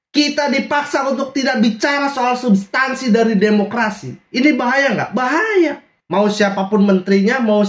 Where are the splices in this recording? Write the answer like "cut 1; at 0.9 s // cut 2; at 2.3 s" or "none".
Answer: cut 1; at 5.9 s